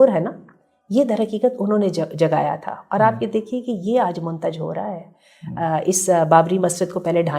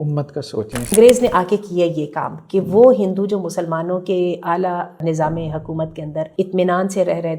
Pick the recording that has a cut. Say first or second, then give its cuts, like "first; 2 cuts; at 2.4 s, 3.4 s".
second; 3 cuts; at 0.9 s, 5.0 s, 6.3 s